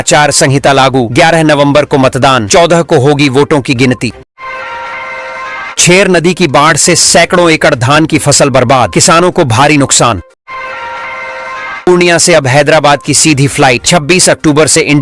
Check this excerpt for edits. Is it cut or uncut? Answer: uncut